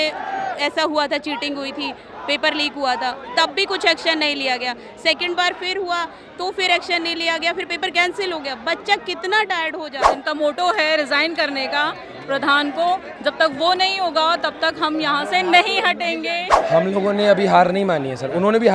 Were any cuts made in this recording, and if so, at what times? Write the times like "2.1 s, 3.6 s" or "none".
10.0 s, 16.5 s